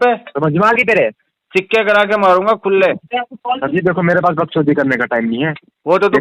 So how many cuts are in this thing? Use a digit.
1